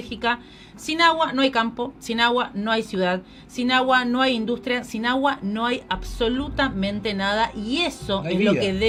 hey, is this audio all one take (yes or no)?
yes